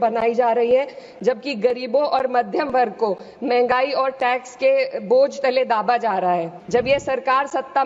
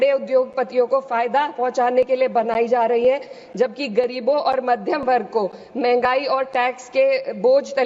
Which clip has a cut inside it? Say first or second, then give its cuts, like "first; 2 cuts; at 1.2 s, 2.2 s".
first; 1 cut; at 6.6 s